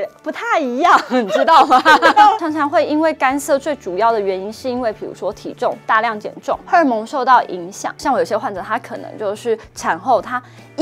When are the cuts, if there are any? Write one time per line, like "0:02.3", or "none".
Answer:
0:02.4
0:06.6
0:08.0